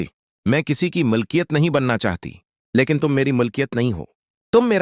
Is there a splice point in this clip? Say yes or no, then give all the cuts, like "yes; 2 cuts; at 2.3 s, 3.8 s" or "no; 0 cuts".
no; 0 cuts